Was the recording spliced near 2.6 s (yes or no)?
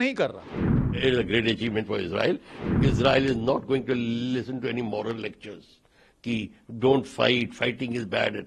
yes